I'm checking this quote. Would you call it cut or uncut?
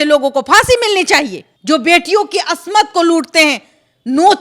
cut